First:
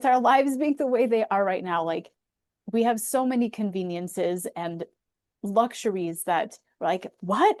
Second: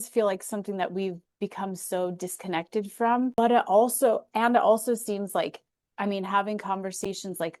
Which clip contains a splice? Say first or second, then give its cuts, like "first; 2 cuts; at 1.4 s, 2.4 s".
second; 1 cut; at 3.4 s